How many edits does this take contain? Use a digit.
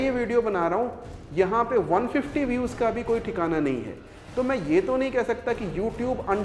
0